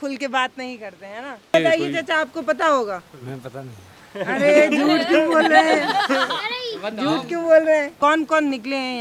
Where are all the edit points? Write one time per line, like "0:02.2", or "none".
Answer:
0:01.5
0:08.0